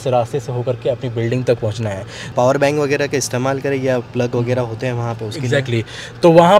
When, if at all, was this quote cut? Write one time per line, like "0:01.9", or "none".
0:02.2